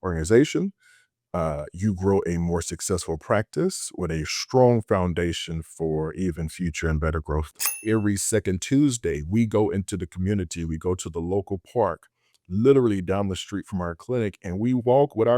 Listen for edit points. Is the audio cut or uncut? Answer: cut